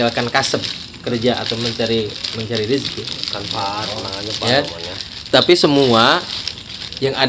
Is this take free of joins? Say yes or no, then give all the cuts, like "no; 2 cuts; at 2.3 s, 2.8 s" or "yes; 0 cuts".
yes; 0 cuts